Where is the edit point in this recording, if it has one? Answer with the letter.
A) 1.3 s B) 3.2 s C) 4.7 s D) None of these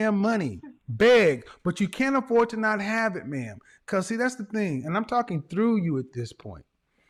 D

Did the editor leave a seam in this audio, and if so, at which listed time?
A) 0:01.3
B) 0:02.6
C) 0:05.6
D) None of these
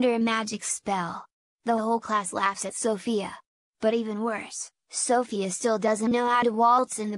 C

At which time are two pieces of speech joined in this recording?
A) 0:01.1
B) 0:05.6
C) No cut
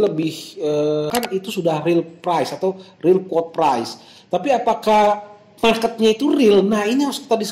A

